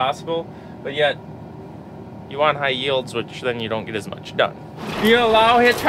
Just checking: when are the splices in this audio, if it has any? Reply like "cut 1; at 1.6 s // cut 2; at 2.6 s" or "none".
cut 1; at 4.7 s